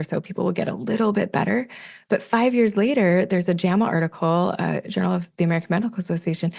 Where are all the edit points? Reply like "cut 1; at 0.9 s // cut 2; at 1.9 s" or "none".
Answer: none